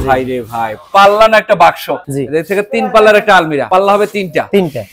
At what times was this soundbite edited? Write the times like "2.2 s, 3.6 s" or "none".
2.0 s, 3.7 s